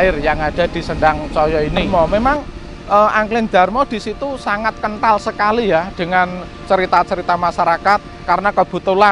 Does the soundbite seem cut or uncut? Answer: cut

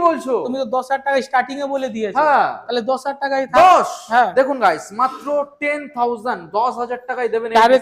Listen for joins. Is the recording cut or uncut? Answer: uncut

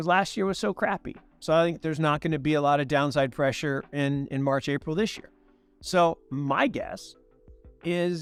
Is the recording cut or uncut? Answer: uncut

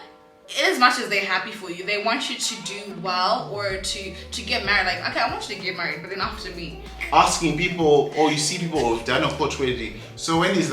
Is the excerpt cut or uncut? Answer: cut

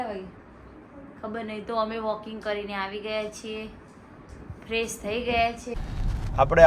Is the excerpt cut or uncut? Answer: cut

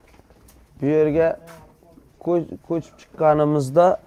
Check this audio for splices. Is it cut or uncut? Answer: uncut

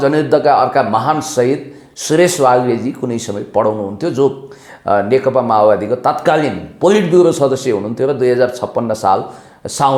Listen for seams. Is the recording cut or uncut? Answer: uncut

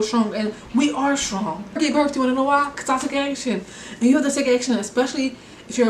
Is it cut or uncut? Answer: cut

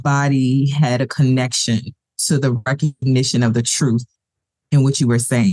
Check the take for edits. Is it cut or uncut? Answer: uncut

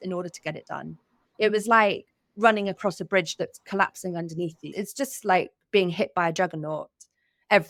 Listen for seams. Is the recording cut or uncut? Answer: cut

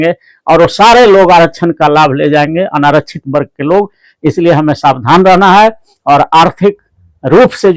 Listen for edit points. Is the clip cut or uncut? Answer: uncut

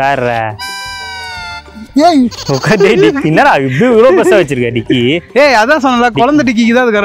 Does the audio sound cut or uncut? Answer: uncut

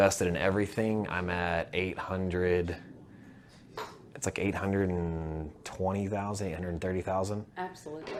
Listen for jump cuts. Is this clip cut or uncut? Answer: uncut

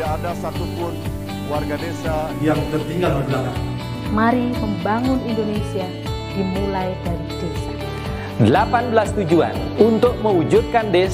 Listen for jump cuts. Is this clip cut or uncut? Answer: uncut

